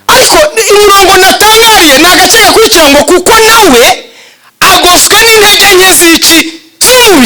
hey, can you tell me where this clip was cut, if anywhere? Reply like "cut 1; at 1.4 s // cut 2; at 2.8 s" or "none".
none